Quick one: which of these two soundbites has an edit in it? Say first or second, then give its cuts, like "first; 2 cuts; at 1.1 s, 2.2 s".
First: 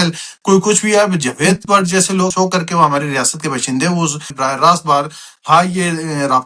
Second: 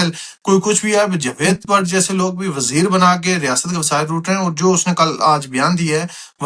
first; 2 cuts; at 2.3 s, 4.3 s